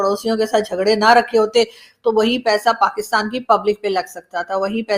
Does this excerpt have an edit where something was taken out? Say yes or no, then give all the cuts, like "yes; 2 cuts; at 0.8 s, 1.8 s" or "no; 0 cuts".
no; 0 cuts